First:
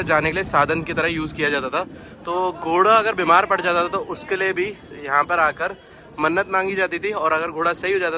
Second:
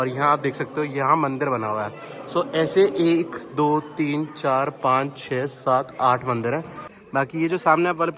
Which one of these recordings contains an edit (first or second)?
second